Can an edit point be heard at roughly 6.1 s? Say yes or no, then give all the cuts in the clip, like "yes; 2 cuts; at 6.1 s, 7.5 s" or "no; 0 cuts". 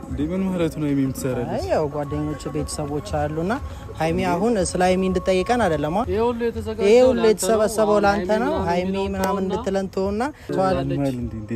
yes; 2 cuts; at 6.1 s, 10.5 s